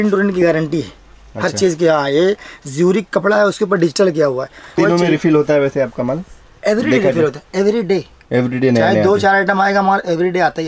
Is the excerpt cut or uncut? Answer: cut